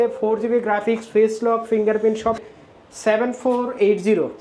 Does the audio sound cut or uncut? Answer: cut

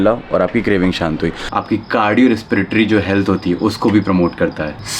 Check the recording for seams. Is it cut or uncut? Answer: cut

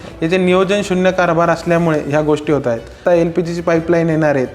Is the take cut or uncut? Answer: cut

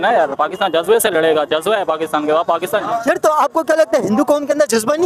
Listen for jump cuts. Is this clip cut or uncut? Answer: uncut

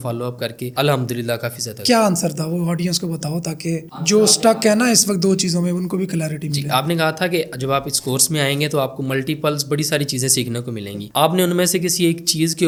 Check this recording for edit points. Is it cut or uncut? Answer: uncut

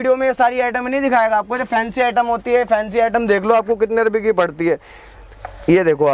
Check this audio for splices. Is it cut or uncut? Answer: uncut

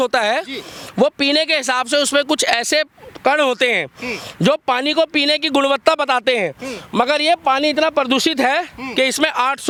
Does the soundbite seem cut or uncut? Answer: uncut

